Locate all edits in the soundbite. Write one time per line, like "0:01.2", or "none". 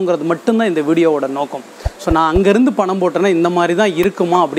none